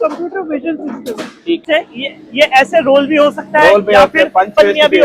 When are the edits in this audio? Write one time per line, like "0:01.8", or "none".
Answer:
0:01.6